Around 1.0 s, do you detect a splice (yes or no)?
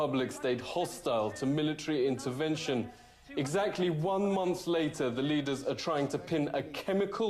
no